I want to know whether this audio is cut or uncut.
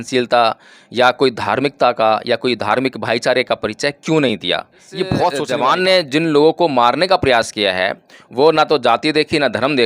cut